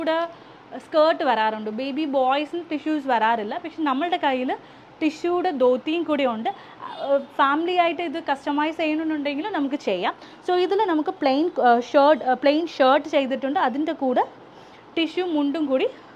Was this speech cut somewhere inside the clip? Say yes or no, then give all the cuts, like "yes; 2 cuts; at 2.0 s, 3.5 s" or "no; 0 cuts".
no; 0 cuts